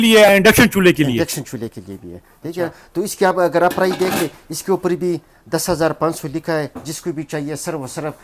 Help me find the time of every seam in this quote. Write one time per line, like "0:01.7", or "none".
none